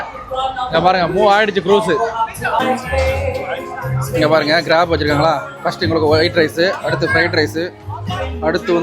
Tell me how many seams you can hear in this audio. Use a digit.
1